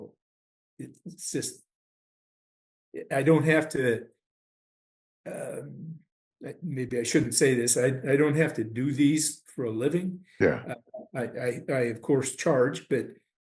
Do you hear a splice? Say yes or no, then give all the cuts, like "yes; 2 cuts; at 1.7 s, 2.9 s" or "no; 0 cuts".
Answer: no; 0 cuts